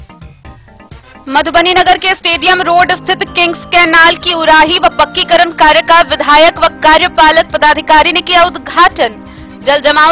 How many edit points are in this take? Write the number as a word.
one